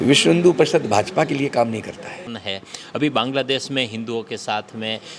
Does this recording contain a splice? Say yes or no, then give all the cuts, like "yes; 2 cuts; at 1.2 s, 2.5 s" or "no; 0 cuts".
yes; 1 cut; at 2.2 s